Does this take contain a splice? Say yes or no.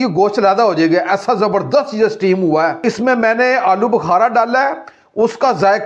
yes